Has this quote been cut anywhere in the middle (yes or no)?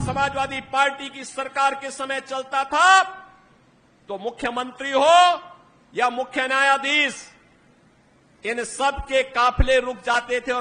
no